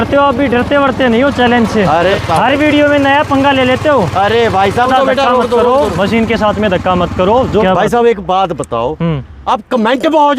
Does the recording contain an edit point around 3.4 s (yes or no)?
no